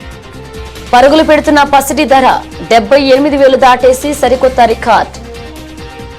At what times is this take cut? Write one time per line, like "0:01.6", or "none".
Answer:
0:05.1